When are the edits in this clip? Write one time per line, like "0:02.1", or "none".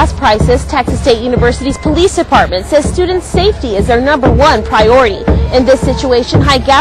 none